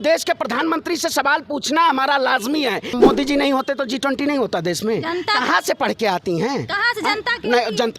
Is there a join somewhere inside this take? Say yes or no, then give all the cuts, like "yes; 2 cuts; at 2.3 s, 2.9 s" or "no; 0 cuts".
yes; 1 cut; at 3.0 s